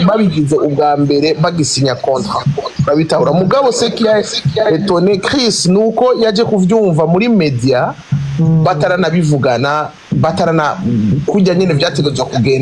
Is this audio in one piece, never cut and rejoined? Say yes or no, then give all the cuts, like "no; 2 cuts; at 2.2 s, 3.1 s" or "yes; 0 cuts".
yes; 0 cuts